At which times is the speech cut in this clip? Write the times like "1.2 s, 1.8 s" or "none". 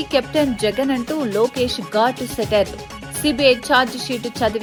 none